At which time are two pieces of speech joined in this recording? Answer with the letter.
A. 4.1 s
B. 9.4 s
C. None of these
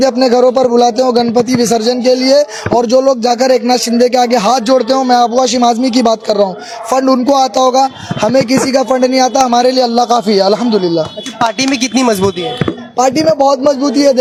C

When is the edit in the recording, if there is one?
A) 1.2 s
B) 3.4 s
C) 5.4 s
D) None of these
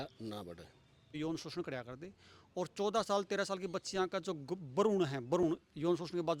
A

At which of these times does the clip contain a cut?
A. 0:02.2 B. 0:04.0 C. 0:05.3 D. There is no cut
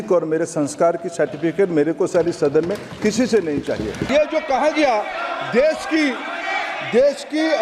B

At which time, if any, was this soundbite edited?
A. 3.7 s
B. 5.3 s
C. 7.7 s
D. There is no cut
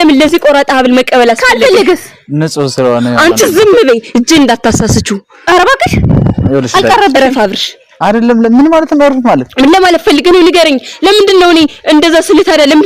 D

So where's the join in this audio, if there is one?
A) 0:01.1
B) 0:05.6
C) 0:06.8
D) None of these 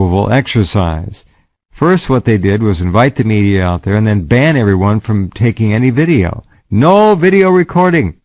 B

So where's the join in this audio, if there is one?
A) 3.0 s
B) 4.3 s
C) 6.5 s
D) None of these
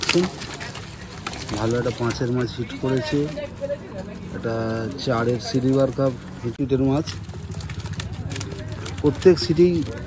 C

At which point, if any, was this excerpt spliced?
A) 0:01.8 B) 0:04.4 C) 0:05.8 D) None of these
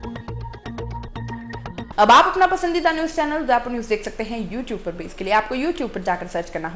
D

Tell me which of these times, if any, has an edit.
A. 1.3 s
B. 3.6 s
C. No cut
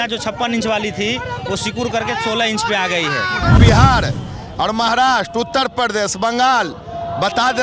B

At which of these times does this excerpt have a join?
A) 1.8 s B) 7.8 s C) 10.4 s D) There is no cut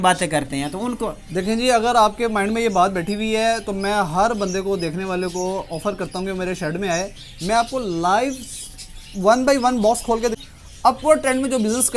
C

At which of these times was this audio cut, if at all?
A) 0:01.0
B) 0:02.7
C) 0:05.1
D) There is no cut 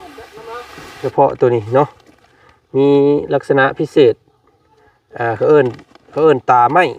A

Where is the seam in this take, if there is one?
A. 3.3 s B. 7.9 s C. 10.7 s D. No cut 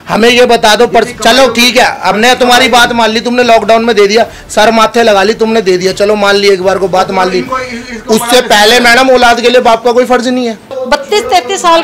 C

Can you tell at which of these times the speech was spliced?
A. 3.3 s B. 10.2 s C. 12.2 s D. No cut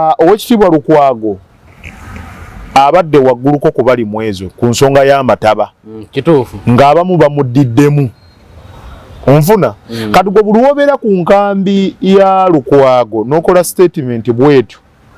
D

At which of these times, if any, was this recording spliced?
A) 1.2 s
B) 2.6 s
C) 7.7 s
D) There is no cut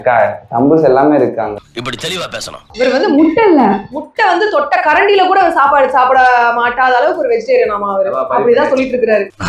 B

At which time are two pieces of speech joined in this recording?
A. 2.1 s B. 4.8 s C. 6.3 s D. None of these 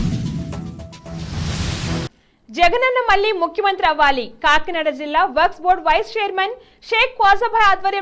A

